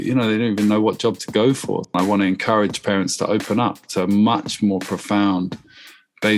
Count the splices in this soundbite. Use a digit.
1